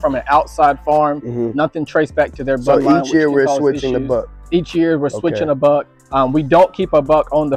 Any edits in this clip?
no; 0 cuts

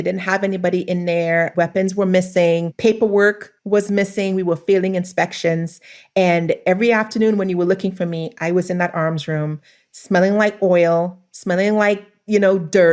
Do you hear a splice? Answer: no; 0 cuts

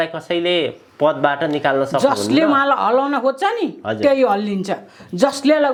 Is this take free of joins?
yes; 0 cuts

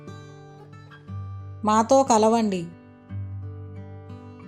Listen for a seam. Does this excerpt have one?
yes; 1 cut; at 1.2 s

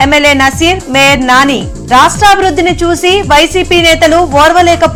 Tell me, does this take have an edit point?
no; 0 cuts

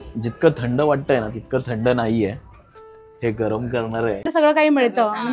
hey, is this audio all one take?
no; 1 cut; at 4.2 s

